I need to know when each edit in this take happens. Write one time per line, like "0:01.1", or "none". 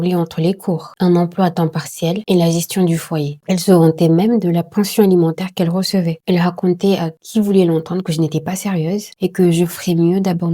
0:03.4
0:06.1